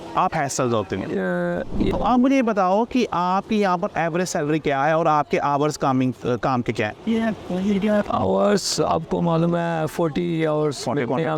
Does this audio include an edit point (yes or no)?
yes